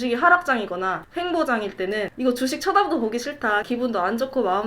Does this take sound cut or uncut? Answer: cut